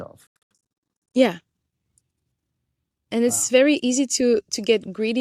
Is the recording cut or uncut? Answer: uncut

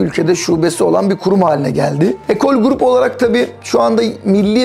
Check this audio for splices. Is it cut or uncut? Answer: cut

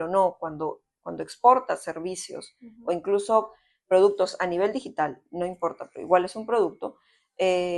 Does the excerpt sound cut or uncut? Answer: uncut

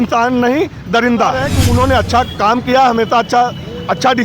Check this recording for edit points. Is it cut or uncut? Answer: cut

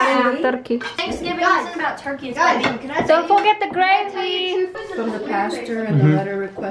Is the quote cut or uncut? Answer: cut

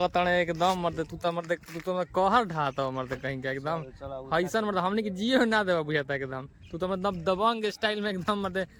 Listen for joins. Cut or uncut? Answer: uncut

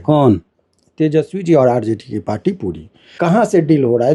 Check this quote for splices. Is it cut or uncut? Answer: cut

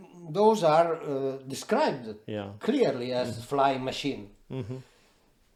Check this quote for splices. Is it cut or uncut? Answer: uncut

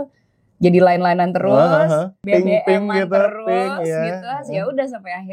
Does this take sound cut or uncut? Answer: cut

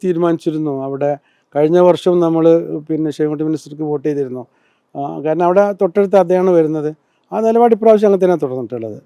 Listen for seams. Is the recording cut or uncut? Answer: uncut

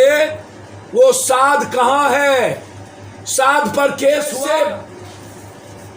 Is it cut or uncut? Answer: cut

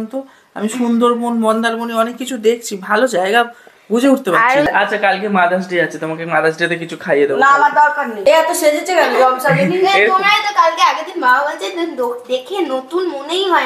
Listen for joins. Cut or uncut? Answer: cut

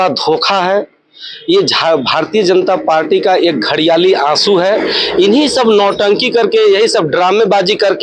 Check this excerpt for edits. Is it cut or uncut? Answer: uncut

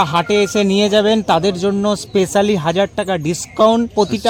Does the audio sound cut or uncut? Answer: uncut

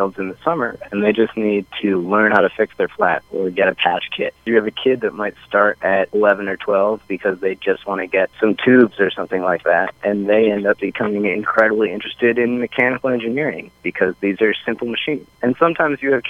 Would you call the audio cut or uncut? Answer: cut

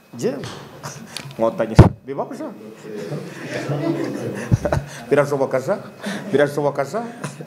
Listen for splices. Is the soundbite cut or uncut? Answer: uncut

